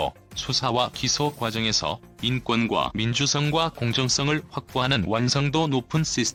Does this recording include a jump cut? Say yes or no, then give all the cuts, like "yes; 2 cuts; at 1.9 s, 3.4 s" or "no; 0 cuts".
no; 0 cuts